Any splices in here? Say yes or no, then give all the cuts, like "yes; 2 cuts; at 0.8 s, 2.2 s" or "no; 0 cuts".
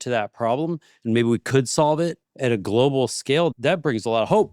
yes; 2 cuts; at 2.3 s, 3.5 s